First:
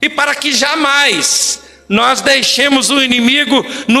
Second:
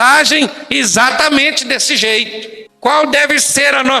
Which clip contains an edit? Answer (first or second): second